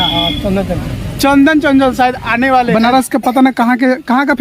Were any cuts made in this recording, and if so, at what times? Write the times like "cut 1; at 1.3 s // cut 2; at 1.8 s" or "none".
cut 1; at 2.7 s